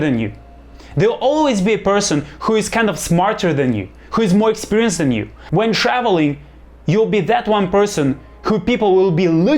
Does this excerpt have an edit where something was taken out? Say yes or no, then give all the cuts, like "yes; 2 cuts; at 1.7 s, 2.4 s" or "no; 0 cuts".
yes; 1 cut; at 5.3 s